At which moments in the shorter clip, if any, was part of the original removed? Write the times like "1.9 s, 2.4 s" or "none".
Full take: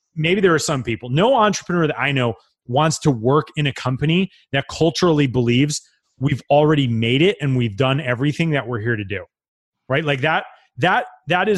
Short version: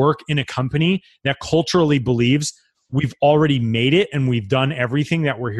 none